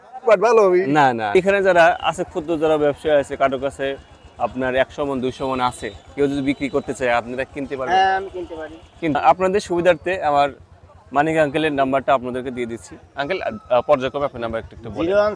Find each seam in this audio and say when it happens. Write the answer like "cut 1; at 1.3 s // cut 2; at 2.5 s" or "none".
cut 1; at 1.4 s // cut 2; at 9.1 s